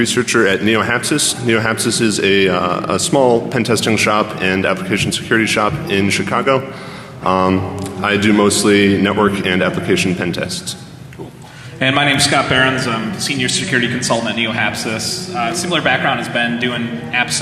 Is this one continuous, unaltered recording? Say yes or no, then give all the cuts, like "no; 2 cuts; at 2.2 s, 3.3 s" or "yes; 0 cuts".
yes; 0 cuts